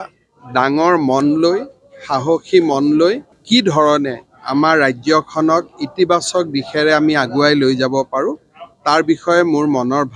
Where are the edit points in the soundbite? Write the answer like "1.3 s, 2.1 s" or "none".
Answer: 3.3 s